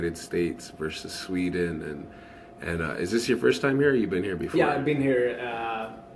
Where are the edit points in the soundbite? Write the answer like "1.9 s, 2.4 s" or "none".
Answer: none